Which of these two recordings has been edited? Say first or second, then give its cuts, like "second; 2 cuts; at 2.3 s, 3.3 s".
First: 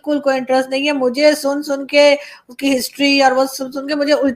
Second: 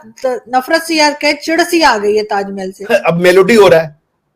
second; 1 cut; at 2.8 s